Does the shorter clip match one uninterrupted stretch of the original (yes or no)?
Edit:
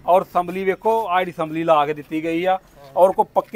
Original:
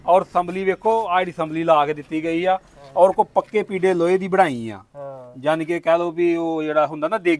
yes